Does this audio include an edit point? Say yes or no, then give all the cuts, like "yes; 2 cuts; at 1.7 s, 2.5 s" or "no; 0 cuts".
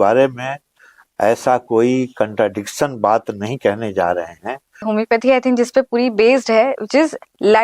yes; 1 cut; at 4.8 s